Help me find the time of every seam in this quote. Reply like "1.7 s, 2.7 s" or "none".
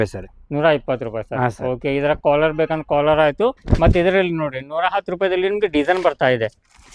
3.6 s